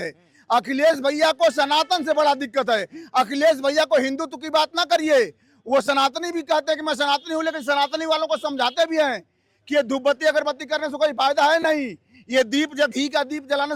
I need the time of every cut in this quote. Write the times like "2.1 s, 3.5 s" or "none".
none